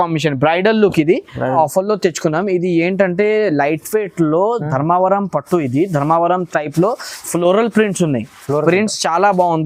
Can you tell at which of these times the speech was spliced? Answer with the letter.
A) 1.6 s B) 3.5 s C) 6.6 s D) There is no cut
A